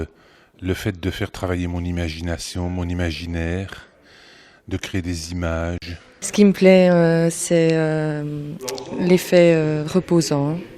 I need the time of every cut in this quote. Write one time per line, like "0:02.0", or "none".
none